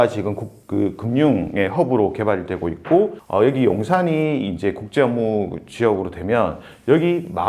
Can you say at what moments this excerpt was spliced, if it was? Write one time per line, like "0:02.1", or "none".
0:03.2